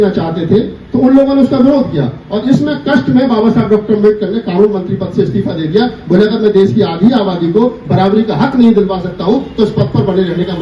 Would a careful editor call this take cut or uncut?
uncut